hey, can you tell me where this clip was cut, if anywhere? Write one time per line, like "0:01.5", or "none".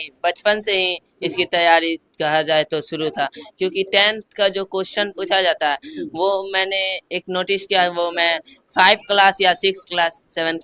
none